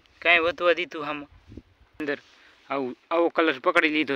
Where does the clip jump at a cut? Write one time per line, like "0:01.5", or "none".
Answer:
0:02.0